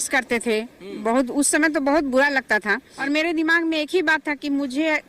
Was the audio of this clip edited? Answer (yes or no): yes